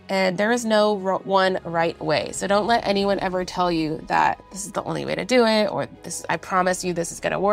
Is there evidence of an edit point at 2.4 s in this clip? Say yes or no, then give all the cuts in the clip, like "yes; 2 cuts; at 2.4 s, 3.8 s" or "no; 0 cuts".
no; 0 cuts